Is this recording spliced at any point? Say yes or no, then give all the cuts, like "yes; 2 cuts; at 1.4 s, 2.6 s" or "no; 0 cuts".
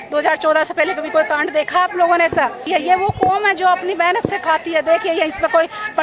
yes; 1 cut; at 2.7 s